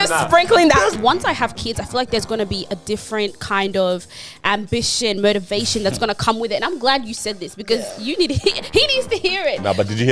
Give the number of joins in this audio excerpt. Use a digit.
1